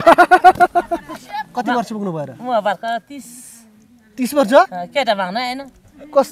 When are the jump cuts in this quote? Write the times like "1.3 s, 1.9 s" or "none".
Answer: 1.5 s